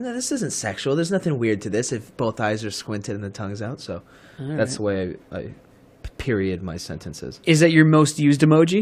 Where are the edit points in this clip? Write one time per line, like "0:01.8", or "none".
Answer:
0:02.1